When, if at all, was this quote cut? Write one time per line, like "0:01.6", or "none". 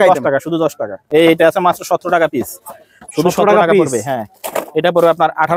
0:01.0